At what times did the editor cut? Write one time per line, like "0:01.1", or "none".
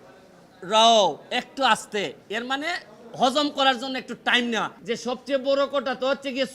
0:04.7